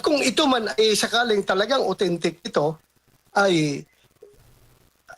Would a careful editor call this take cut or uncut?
cut